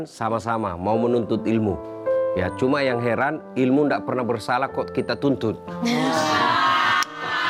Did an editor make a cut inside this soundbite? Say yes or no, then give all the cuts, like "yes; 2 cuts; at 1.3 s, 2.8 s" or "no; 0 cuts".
no; 0 cuts